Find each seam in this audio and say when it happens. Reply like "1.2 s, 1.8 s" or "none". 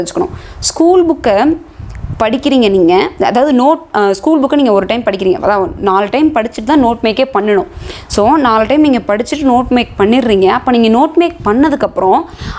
none